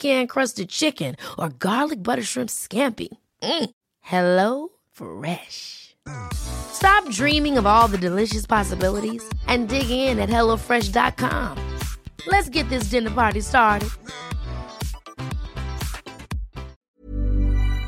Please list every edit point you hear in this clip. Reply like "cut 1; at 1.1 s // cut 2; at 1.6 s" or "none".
cut 1; at 16.8 s